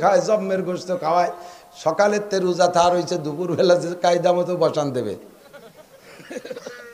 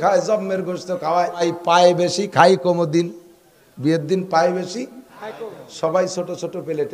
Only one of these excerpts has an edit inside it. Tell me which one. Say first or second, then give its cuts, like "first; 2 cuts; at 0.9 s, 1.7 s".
second; 1 cut; at 1.4 s